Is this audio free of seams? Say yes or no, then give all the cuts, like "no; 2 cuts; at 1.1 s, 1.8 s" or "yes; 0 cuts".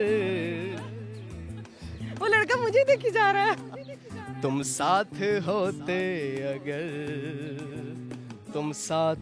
yes; 0 cuts